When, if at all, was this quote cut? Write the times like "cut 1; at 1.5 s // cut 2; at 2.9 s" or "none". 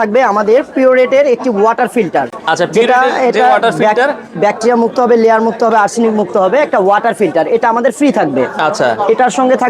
none